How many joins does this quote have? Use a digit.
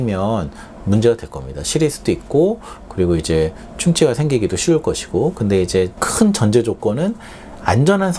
0